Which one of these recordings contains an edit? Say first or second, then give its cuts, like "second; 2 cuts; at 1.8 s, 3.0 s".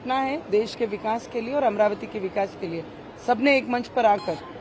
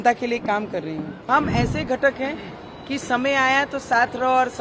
second; 1 cut; at 1.3 s